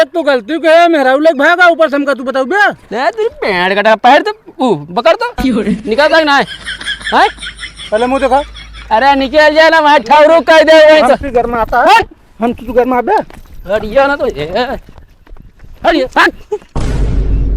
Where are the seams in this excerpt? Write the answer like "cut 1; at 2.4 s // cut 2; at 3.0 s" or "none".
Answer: cut 1; at 16.7 s